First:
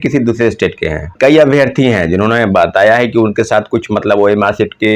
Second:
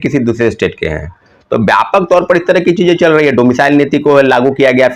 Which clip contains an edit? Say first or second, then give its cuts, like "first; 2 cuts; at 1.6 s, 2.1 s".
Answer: first; 1 cut; at 1.1 s